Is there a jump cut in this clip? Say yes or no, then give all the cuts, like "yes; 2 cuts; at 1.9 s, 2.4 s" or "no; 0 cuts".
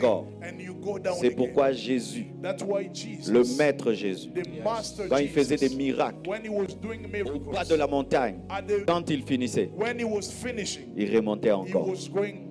yes; 1 cut; at 8.8 s